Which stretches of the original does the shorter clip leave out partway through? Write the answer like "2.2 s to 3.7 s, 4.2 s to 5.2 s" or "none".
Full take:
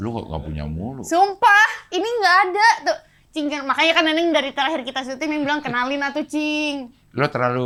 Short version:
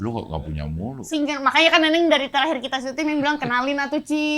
0.9 s to 3.1 s

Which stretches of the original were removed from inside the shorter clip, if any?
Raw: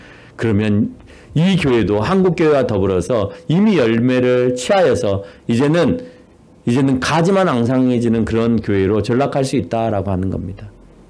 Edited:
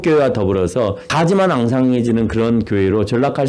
3.4 s to 7.0 s

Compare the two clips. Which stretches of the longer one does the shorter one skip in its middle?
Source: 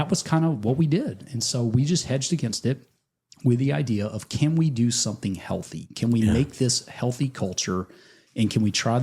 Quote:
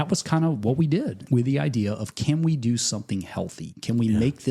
1.2 s to 3.3 s

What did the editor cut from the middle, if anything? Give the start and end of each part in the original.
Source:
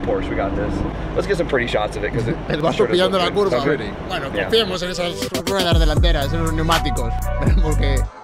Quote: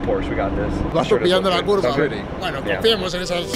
0.9 s to 2.6 s

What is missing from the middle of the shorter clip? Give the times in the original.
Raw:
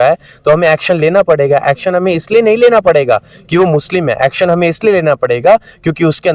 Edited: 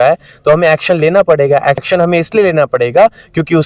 1.8 s to 4.3 s

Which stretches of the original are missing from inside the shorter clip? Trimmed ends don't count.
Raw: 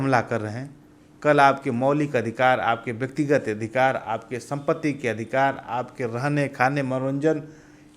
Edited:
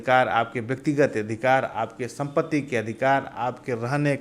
none

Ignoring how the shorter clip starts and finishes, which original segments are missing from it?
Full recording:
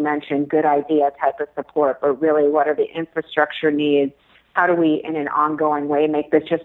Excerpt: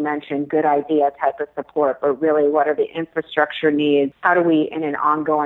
4.2 s to 4.5 s

